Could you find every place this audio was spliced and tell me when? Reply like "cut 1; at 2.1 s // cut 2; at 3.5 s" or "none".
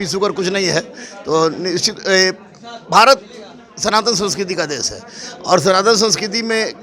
none